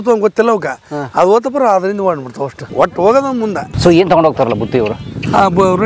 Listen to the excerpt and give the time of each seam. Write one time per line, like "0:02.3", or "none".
0:02.6
0:03.7